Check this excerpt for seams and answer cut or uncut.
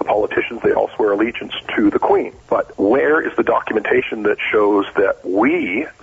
cut